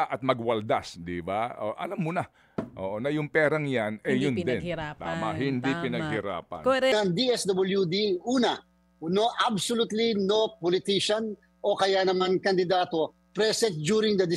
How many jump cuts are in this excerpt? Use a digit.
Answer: 1